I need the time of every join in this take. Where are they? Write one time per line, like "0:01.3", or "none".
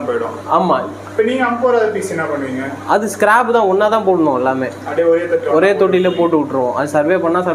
none